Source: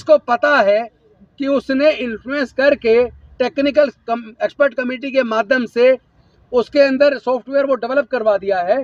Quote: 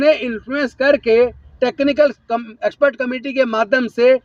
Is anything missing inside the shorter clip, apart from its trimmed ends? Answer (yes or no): no